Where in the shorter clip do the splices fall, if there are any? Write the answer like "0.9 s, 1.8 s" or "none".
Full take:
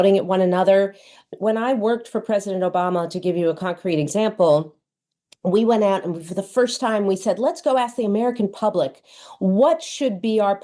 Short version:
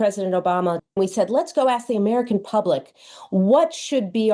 0.9 s